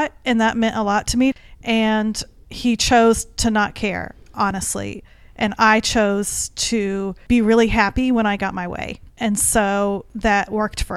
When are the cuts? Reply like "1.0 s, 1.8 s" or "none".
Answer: 1.3 s, 7.1 s, 10.1 s